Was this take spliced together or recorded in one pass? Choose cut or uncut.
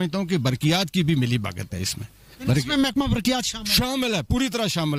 uncut